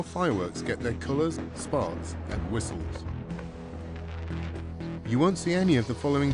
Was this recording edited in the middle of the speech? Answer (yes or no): yes